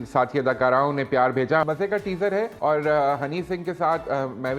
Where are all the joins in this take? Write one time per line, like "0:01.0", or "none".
0:01.6
0:02.5